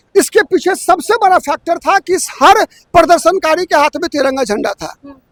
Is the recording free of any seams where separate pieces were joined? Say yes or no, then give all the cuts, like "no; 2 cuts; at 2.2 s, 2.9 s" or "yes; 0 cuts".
yes; 0 cuts